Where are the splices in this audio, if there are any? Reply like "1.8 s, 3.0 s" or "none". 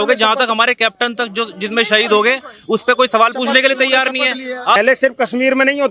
4.8 s